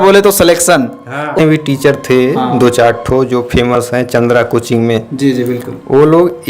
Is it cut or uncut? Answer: cut